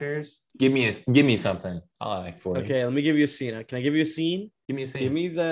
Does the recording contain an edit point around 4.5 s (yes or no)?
yes